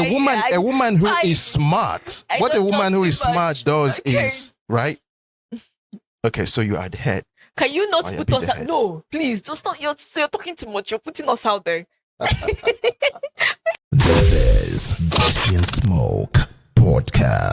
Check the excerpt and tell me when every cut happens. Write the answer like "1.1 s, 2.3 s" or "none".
12.0 s, 13.7 s